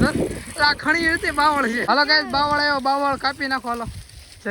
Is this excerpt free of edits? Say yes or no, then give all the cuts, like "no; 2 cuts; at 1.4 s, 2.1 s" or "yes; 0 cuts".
no; 1 cut; at 1.8 s